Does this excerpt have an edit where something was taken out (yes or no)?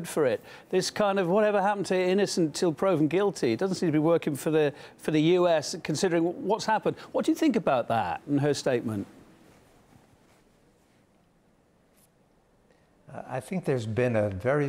no